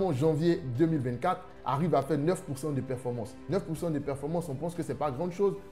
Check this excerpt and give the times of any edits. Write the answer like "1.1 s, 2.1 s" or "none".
3.3 s